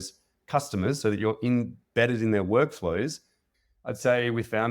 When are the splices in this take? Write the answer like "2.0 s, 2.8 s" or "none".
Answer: 3.5 s